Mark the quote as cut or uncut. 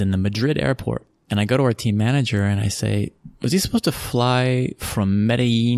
cut